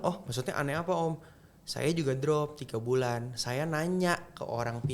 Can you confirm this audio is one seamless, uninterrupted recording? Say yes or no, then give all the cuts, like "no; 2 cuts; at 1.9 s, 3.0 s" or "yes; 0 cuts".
yes; 0 cuts